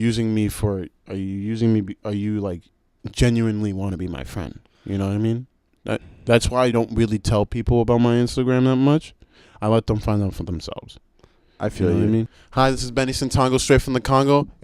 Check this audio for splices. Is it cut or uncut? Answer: cut